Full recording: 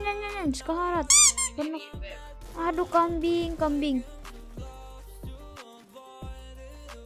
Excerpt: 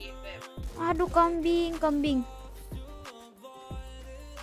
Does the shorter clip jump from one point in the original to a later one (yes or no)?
yes